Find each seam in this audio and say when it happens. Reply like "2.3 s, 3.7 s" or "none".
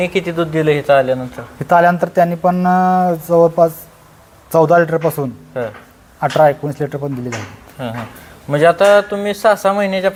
none